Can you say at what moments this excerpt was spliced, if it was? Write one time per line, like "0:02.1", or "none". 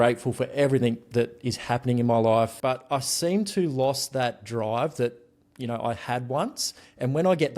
0:02.5